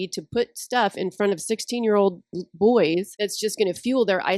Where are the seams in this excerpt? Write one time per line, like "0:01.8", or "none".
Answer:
0:03.1

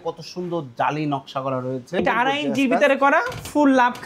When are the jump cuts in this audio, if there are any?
0:02.0

